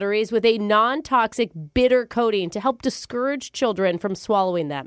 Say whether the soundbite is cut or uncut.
uncut